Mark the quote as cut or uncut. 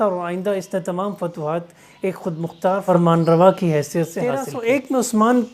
cut